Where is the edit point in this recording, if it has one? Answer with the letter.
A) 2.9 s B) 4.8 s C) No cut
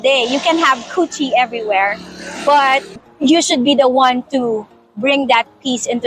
A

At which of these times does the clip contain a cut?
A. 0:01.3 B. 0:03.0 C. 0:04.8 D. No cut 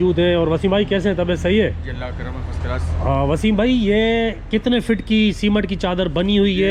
D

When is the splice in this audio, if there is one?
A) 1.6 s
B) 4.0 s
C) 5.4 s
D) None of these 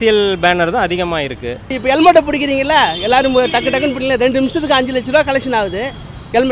A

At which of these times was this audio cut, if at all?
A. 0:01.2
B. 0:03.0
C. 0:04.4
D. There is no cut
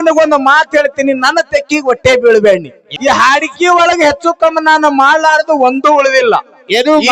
B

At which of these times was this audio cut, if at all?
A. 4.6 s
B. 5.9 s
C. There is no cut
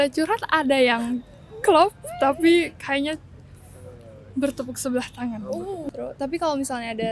B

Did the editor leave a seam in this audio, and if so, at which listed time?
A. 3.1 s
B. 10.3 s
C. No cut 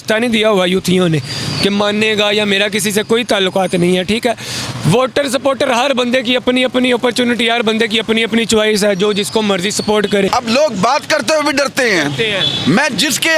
B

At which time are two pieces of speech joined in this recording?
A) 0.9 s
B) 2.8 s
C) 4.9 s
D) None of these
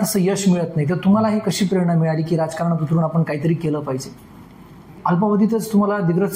C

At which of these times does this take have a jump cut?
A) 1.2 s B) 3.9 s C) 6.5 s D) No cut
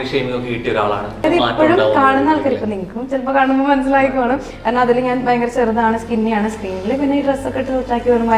A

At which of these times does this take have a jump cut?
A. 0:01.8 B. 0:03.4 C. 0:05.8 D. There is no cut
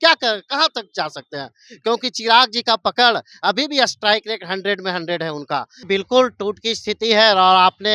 C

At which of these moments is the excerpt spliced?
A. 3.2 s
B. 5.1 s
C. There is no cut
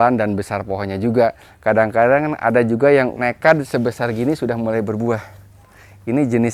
A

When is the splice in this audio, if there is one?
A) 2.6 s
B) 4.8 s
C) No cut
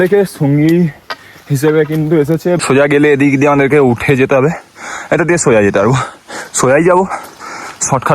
A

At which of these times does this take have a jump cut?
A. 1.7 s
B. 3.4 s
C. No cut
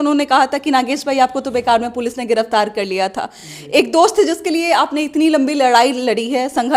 C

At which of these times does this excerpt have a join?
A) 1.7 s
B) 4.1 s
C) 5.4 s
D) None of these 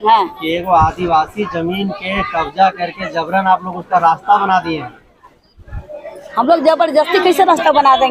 D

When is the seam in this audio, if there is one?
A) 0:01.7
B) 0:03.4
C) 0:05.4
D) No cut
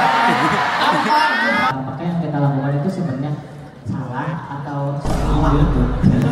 A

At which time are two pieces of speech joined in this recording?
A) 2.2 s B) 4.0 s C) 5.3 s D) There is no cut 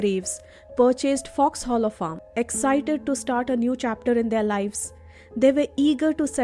A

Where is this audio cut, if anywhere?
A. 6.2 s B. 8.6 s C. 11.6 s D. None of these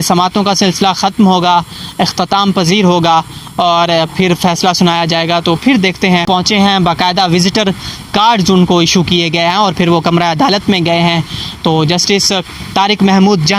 A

